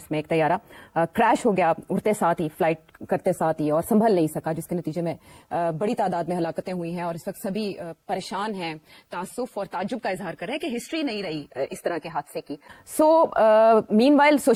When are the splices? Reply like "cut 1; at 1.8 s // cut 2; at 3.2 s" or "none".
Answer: none

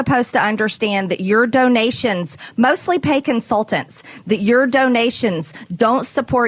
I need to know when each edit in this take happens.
none

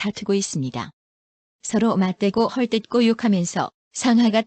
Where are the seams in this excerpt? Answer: cut 1; at 1.7 s

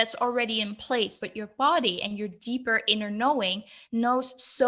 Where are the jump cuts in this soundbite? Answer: cut 1; at 1.2 s

